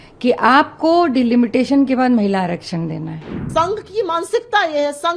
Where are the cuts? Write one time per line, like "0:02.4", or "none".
0:03.4